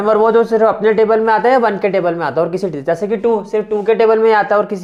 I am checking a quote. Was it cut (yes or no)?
no